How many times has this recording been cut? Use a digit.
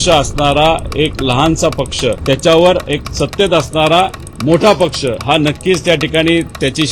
3